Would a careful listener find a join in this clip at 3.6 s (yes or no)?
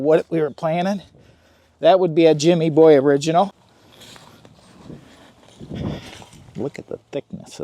yes